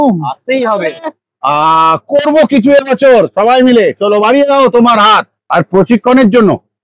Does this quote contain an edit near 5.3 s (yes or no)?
yes